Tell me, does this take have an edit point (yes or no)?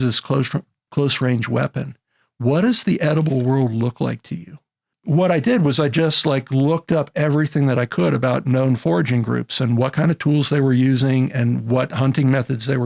yes